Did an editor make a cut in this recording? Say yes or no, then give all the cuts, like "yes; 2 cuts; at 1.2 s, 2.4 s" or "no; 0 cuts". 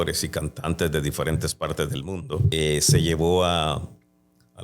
yes; 1 cut; at 2.5 s